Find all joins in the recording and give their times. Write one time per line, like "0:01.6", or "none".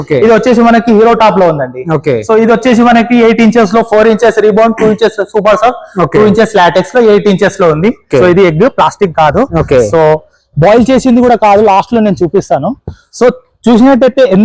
0:08.0